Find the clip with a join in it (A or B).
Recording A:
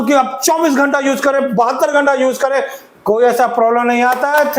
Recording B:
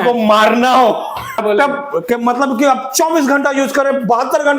B